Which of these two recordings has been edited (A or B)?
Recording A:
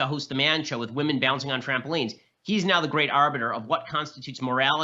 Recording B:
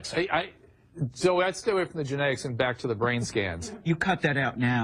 A